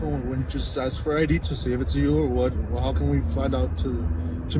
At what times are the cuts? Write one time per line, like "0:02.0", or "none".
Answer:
none